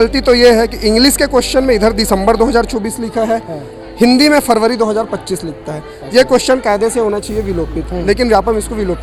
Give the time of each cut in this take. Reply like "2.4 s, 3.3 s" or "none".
none